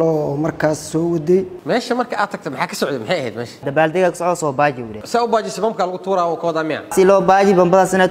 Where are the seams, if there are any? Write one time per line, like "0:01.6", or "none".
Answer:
0:01.5
0:03.6
0:06.9